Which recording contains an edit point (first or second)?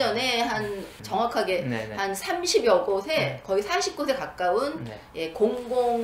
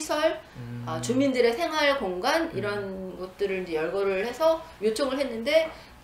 first